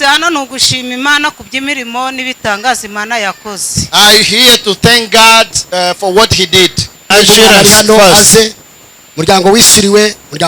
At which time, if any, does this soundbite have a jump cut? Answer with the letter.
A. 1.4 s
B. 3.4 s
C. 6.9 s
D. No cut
C